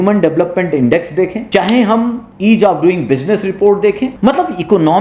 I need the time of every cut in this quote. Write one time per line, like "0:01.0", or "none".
0:01.4
0:02.3
0:04.1